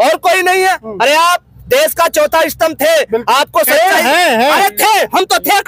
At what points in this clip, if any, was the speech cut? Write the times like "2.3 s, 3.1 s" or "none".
none